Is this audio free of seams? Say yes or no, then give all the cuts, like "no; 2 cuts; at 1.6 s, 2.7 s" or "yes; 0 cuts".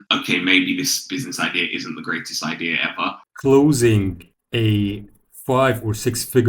no; 1 cut; at 3.2 s